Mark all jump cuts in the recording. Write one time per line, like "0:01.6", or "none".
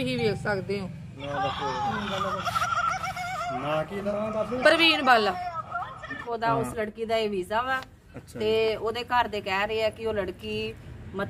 0:06.2